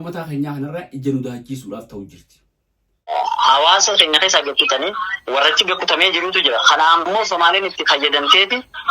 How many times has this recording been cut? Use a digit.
1